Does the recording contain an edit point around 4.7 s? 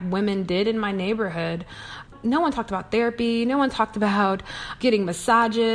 yes; 2 cuts; at 2.1 s, 4.7 s

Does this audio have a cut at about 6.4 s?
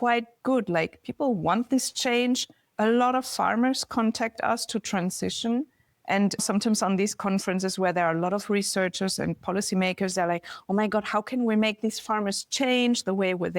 yes; 1 cut; at 6.4 s

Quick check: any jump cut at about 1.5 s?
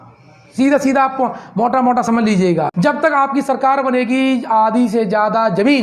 no; 1 cut; at 2.7 s

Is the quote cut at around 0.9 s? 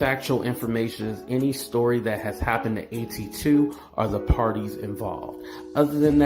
no; 0 cuts

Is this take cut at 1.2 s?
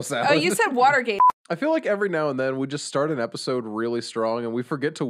yes; 1 cut; at 1.2 s

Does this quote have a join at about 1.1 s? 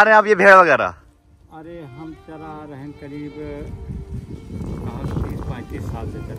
no; 0 cuts

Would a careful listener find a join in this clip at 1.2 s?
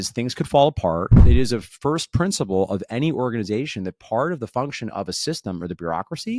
yes; 1 cut; at 1.2 s

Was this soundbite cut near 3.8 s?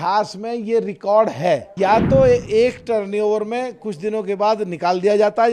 no; 1 cut; at 1.7 s

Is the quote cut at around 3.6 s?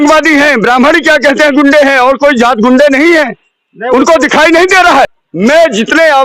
no; 1 cut; at 5.2 s

